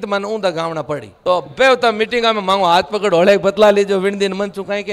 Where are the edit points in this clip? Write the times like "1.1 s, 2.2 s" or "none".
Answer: 1.1 s